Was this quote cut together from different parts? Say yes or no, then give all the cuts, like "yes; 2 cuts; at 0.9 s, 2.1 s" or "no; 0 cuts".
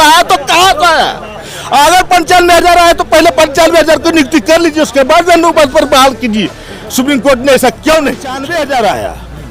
yes; 1 cut; at 8.4 s